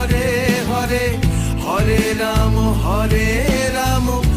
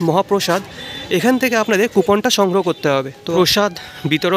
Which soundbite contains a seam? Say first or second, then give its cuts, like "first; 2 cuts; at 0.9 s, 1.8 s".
second; 1 cut; at 3.1 s